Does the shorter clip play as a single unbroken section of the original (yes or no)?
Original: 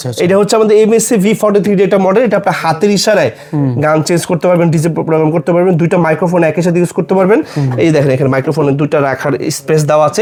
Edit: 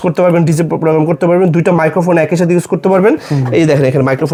yes